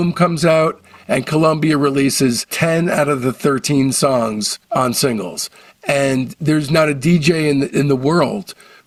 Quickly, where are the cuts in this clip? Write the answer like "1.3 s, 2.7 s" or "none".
none